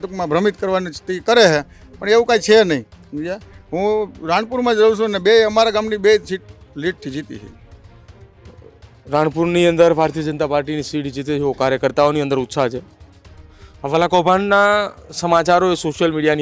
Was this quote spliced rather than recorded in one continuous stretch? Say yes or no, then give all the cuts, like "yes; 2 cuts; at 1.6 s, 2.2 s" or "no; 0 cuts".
no; 0 cuts